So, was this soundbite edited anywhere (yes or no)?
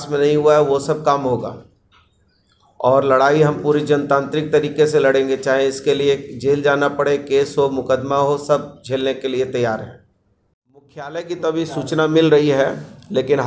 yes